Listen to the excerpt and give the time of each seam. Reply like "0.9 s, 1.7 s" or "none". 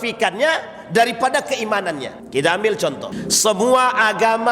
2.1 s, 3.1 s